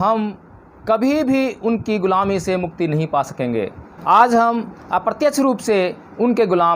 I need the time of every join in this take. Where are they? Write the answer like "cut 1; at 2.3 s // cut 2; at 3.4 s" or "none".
none